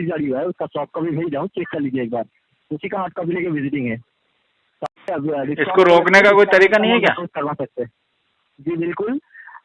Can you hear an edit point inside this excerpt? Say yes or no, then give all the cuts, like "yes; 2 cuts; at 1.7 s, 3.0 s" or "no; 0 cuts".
no; 0 cuts